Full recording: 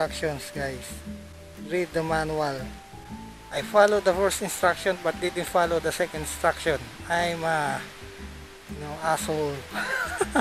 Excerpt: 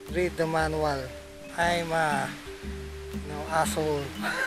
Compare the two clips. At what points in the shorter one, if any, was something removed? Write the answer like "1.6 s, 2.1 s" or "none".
1.4 s